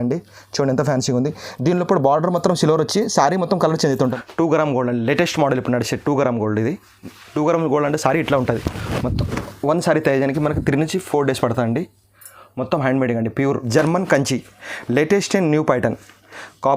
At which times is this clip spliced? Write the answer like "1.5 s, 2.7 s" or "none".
4.1 s, 13.7 s